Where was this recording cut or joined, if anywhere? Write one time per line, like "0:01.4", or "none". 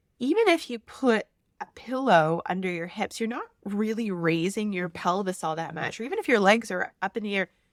none